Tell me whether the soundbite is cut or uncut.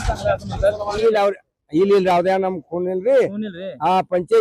cut